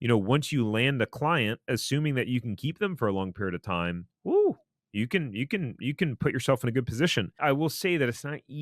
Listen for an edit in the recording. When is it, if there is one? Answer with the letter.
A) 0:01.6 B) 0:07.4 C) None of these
B